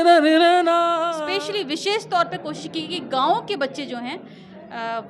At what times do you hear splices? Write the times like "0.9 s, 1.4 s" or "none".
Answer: 1.1 s

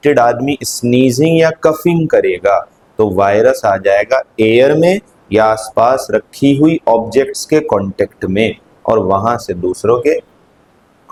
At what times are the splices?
none

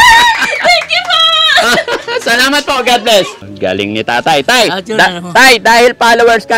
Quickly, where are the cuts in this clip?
3.4 s

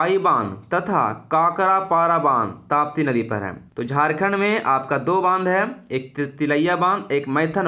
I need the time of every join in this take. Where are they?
3.6 s

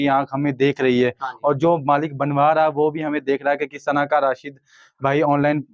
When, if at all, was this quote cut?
none

